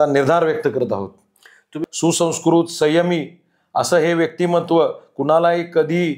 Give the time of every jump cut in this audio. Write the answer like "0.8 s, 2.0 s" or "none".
1.8 s